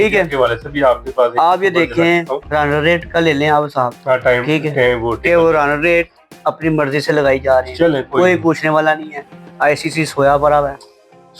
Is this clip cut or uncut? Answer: cut